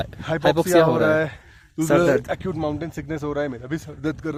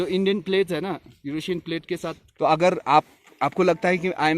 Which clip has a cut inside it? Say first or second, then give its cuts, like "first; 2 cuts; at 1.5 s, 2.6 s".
second; 1 cut; at 2.2 s